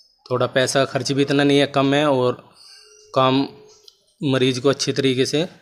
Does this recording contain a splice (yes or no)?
no